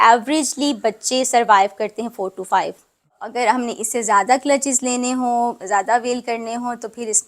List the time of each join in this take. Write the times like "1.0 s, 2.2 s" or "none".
3.2 s